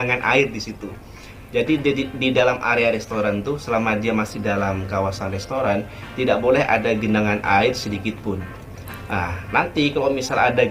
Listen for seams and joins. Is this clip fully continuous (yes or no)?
yes